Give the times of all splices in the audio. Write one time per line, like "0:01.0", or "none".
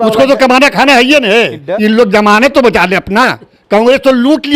0:01.6
0:03.5